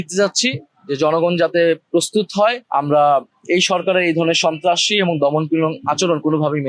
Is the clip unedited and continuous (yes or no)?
yes